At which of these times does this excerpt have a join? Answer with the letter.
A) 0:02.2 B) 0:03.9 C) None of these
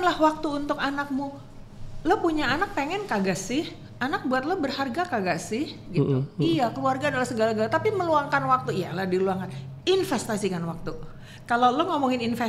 C